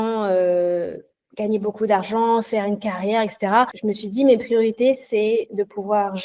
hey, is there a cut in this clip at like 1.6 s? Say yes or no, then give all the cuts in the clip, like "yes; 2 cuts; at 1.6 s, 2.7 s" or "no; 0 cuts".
no; 1 cut; at 3.8 s